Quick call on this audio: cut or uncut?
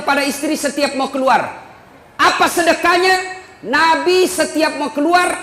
uncut